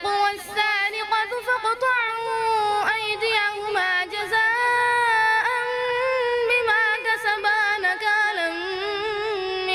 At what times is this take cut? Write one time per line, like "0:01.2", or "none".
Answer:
none